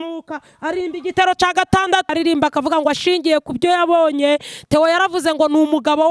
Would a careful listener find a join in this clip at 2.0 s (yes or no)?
yes